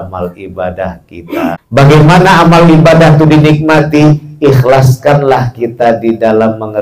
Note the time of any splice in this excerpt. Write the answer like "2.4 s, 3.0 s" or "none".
1.6 s